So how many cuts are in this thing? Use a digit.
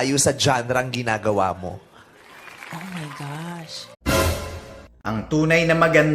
1